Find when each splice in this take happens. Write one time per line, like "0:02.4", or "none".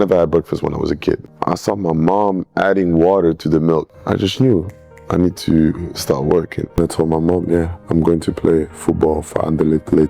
0:01.3
0:03.9
0:06.8